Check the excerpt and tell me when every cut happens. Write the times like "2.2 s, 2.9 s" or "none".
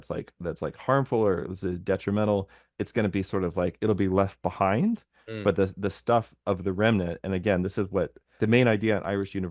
8.4 s